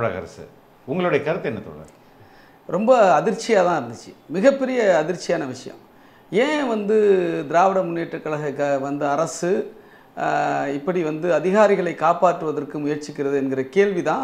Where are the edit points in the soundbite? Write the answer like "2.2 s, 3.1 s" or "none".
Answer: 2.1 s